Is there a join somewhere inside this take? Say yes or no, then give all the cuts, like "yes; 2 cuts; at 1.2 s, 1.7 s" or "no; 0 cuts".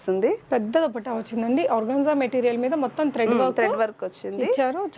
no; 0 cuts